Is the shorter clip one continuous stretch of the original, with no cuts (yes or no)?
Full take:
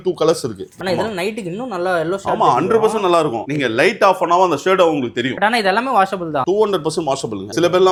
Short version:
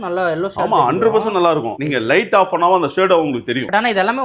yes